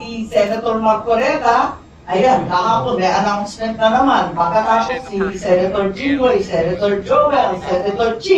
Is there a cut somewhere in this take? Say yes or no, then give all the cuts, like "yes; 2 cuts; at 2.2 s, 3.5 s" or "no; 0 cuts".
no; 0 cuts